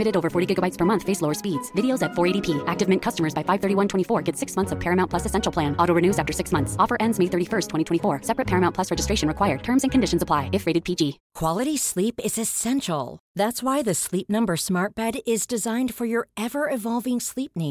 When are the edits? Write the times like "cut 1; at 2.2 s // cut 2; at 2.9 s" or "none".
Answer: cut 1; at 11.3 s